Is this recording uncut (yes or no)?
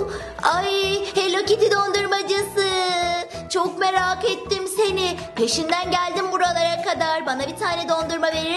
yes